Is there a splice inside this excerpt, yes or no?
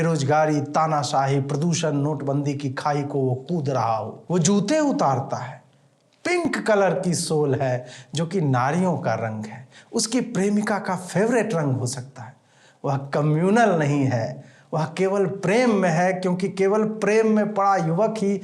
yes